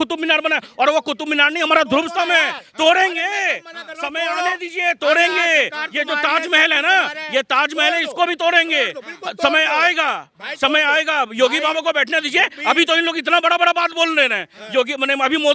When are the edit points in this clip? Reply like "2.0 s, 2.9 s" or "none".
none